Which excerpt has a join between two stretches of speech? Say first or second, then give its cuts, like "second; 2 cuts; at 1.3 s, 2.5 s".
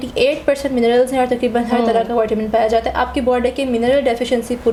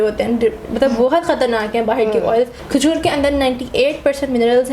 second; 1 cut; at 2.6 s